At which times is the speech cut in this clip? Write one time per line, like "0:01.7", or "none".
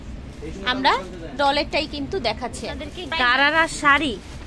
0:02.9